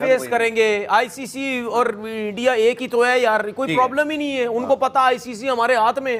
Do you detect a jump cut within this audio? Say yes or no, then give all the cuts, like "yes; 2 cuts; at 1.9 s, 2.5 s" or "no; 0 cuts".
no; 0 cuts